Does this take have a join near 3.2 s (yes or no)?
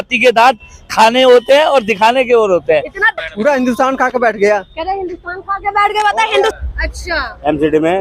yes